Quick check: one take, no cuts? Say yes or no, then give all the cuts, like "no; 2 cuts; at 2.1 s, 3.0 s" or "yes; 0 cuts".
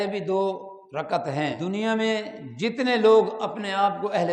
no; 1 cut; at 1.6 s